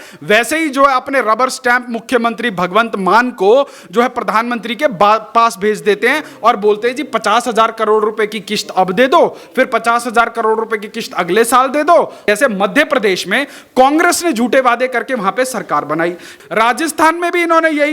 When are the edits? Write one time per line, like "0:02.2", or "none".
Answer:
0:12.3
0:16.3